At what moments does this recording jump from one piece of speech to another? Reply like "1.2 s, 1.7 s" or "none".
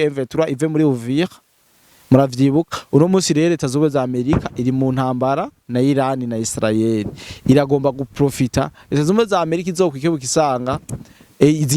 none